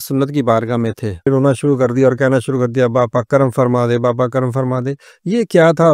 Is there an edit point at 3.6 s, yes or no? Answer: no